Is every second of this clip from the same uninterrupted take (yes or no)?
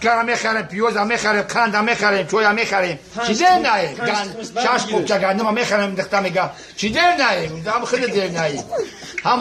yes